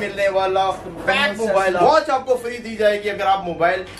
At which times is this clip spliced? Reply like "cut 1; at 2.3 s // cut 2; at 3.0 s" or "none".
cut 1; at 1.8 s